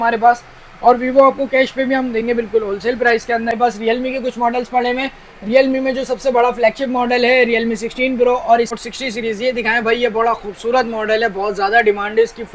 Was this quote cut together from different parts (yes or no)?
yes